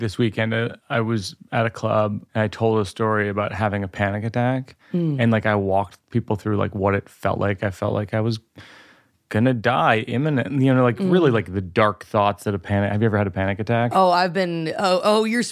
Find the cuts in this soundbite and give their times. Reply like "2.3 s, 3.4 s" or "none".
0.8 s, 1.4 s, 2.2 s